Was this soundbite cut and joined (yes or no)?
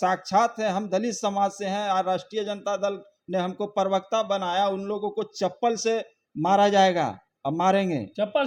no